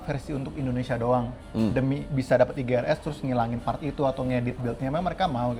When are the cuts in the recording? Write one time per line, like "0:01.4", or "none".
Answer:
none